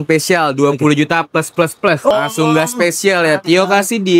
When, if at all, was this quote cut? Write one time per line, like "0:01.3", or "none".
0:02.1